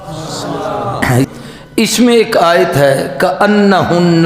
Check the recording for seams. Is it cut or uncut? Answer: cut